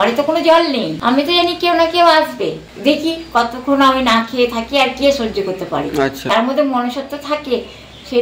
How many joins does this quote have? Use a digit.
3